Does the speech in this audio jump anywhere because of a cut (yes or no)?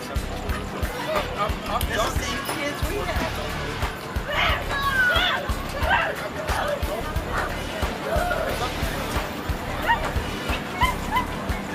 yes